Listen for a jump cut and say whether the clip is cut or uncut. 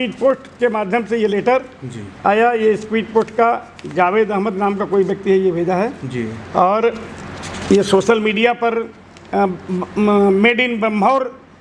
uncut